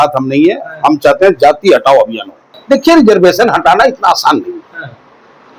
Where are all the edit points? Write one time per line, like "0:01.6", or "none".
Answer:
0:02.5